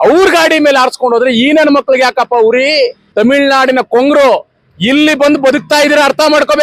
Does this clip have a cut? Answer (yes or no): yes